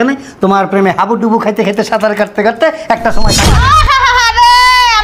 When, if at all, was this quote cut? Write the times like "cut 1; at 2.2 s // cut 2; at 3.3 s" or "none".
cut 1; at 3.4 s